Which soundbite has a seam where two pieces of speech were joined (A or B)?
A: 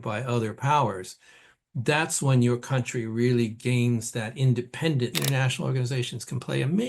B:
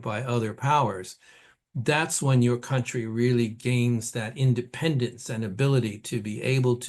A